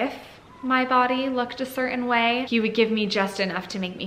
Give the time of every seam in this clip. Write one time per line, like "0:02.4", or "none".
0:02.4